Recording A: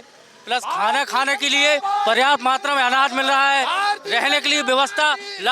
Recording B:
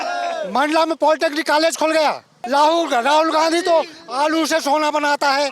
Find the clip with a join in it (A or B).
B